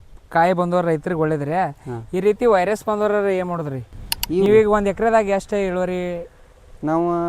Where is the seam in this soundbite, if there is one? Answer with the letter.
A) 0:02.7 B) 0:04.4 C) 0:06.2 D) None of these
B